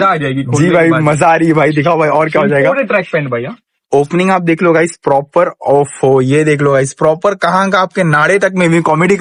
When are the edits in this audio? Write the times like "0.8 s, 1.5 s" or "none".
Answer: none